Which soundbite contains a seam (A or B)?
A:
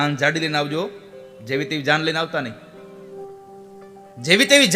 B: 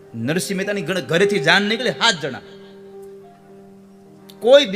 A